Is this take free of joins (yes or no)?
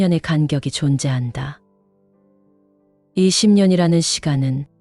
no